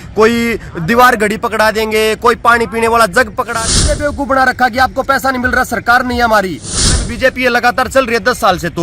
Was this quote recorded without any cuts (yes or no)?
no